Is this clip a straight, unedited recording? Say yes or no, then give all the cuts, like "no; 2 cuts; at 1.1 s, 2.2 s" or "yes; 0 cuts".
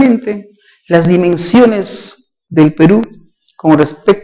yes; 0 cuts